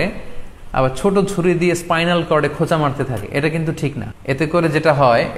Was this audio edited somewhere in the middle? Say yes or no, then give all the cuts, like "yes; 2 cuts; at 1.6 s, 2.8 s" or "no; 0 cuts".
yes; 1 cut; at 4.1 s